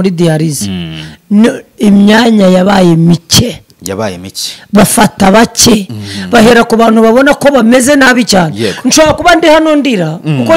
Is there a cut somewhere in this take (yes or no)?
no